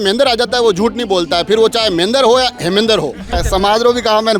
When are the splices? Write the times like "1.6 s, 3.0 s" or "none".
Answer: 3.4 s